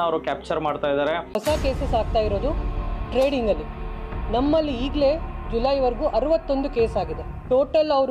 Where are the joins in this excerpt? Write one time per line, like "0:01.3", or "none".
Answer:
0:01.3